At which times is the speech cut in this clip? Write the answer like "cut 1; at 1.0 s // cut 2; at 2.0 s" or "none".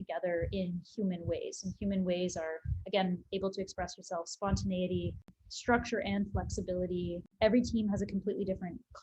cut 1; at 5.4 s // cut 2; at 7.3 s